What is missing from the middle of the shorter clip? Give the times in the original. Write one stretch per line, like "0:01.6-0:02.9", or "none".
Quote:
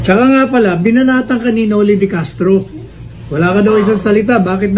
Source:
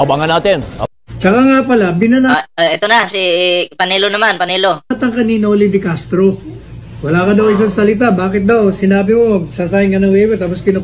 0:02.4-0:04.9